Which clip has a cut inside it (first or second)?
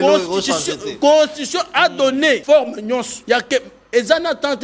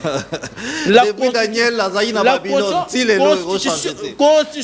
first